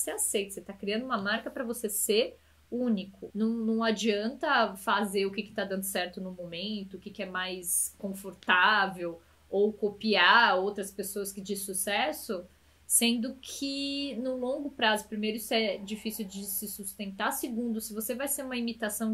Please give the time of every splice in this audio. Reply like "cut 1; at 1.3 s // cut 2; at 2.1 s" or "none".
cut 1; at 3.2 s